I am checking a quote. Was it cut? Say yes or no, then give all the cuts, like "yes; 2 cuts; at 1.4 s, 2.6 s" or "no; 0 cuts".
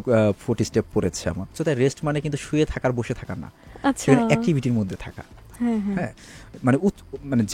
yes; 1 cut; at 1.6 s